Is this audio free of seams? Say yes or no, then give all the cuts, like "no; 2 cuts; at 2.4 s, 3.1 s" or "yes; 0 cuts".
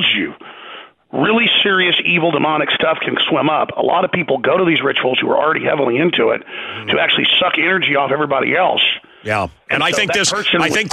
yes; 0 cuts